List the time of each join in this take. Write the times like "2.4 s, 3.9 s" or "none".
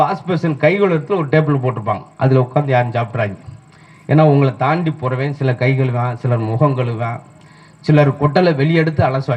none

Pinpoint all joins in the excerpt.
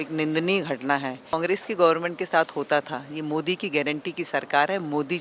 1.4 s

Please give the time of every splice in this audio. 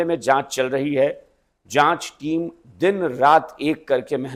none

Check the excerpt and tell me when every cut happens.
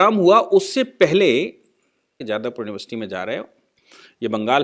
2.1 s

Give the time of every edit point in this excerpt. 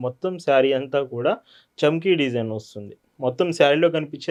none

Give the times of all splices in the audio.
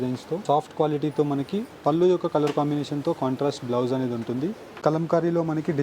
4.7 s

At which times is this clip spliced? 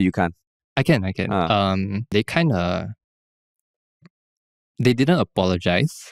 2.1 s

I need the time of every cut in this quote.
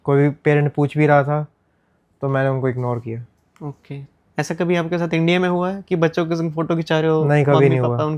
none

